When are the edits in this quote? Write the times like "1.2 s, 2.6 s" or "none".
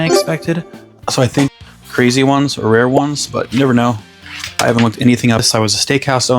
1.5 s, 5.4 s